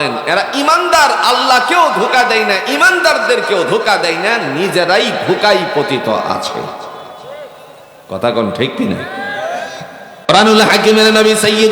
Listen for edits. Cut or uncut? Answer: cut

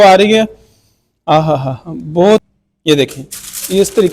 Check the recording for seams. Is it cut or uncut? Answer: cut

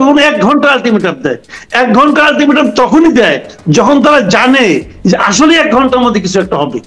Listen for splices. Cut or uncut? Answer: uncut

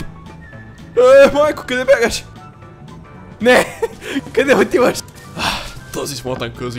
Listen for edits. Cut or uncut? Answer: uncut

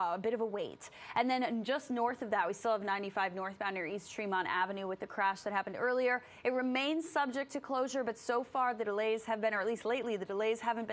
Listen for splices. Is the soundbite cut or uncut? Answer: cut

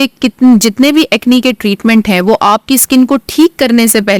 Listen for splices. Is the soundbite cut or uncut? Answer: uncut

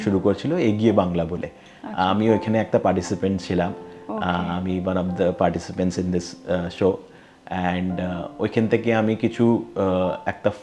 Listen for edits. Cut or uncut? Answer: uncut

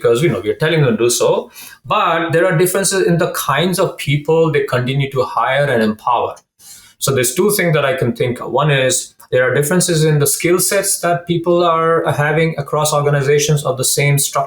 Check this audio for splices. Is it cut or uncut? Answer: uncut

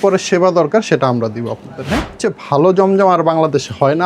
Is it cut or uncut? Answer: cut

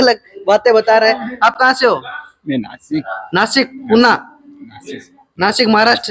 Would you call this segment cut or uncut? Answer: uncut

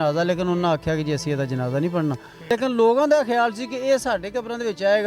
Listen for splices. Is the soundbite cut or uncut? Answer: cut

